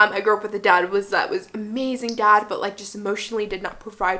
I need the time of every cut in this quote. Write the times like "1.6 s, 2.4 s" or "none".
none